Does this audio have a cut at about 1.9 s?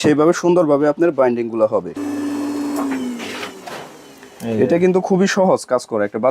yes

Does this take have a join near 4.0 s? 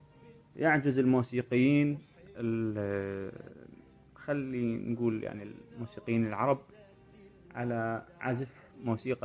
no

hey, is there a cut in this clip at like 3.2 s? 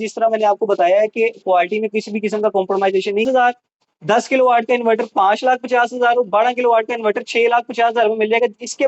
yes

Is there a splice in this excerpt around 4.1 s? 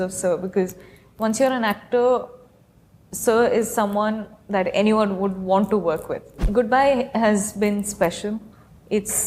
no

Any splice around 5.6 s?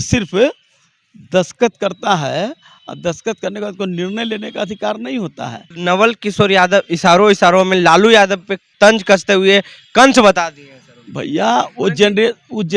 yes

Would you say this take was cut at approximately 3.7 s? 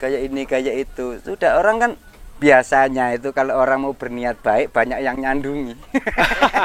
no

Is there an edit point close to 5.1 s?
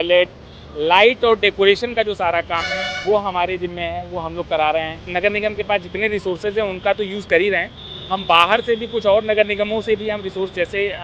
yes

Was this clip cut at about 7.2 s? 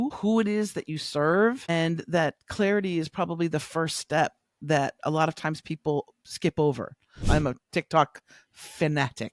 yes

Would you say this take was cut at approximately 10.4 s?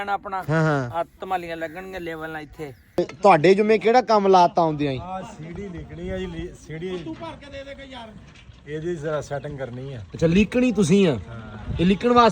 no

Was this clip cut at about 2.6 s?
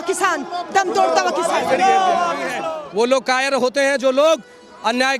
yes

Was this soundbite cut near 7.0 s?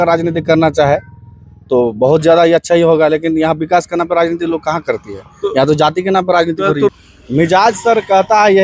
yes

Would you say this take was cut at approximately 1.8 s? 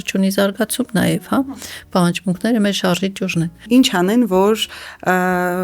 no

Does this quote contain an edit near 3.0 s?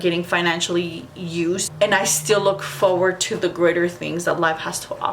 no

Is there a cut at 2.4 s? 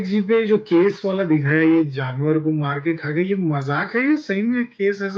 no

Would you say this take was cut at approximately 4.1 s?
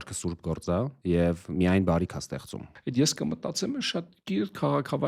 no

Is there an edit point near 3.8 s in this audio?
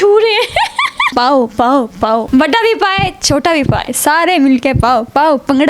yes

